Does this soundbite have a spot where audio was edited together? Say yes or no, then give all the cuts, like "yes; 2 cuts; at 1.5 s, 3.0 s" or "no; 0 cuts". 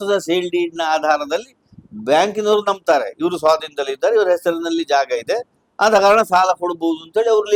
no; 0 cuts